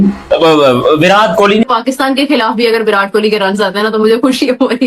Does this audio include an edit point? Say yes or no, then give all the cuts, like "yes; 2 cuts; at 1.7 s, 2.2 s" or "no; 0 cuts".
yes; 1 cut; at 1.6 s